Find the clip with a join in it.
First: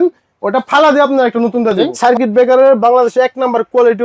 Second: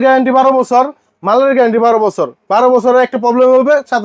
first; 1 cut; at 1.9 s

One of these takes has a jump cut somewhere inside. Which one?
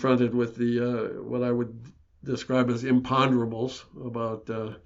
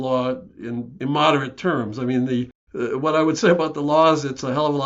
second; 2 cuts; at 1.0 s, 2.6 s

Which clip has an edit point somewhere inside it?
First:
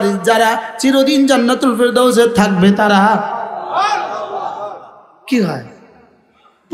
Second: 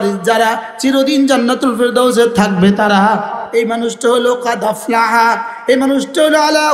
second; 1 cut; at 3.4 s

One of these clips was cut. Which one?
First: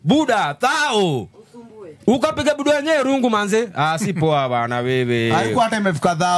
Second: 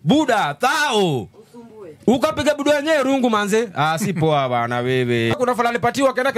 second; 1 cut; at 5.3 s

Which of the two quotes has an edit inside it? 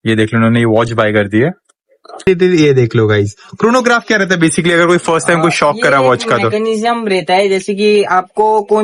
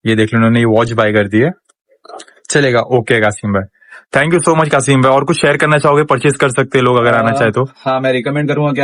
first; 1 cut; at 2.2 s

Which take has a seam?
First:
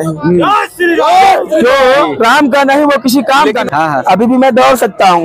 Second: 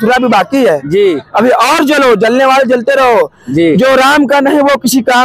first; 1 cut; at 3.6 s

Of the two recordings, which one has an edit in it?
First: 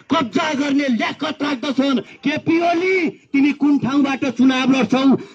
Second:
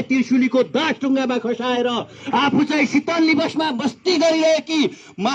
first; 1 cut; at 2.1 s

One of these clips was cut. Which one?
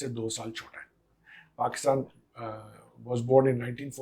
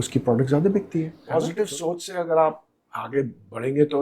second; 1 cut; at 1.2 s

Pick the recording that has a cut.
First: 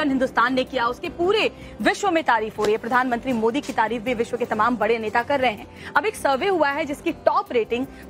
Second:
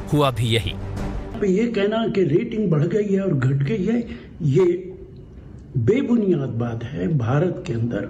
first; 1 cut; at 2.2 s

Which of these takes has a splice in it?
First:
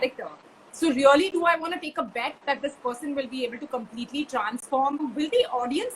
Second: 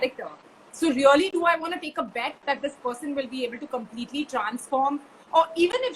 first; 1 cut; at 5.0 s

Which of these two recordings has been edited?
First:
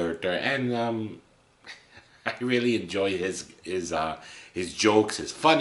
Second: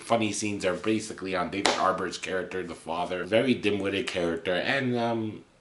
second; 1 cut; at 3.2 s

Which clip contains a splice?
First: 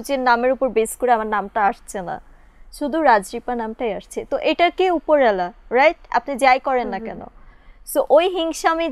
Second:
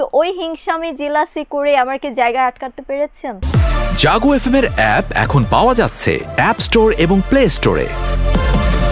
second; 1 cut; at 3.3 s

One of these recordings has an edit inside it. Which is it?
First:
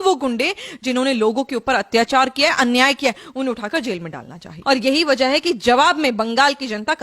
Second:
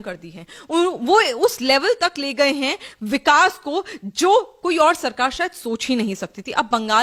first; 1 cut; at 4.5 s

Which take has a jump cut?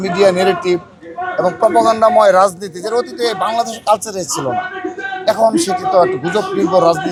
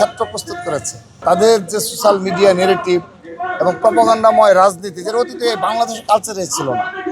second; 1 cut; at 1.2 s

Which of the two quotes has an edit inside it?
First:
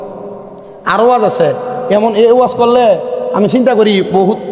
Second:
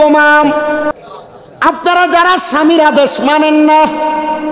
second; 1 cut; at 0.9 s

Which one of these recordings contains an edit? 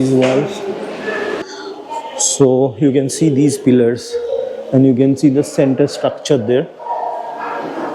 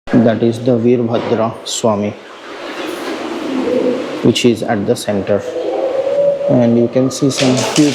first; 1 cut; at 1.4 s

